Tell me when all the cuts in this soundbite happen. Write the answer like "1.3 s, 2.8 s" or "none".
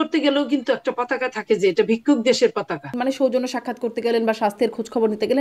2.9 s